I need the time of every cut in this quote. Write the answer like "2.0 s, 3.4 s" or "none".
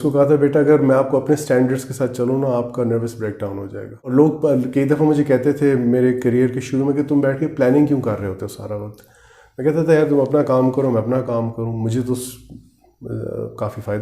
4.1 s